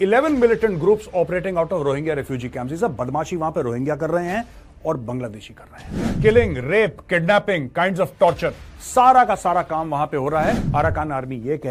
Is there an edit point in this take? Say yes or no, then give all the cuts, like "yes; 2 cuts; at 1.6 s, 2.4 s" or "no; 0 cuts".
no; 0 cuts